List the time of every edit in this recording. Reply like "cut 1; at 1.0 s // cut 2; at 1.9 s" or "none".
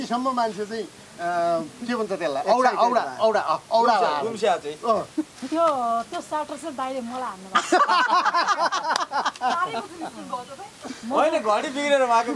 none